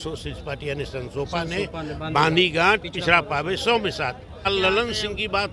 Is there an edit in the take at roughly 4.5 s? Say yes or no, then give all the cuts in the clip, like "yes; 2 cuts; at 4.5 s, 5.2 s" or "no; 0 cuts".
yes; 1 cut; at 4.5 s